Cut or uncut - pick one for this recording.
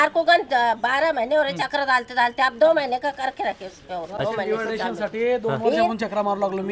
uncut